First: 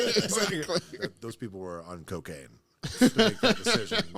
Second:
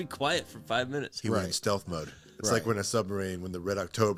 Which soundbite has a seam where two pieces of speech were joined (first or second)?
first